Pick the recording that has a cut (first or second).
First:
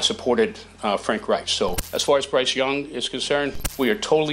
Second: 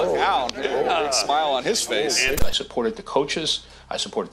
second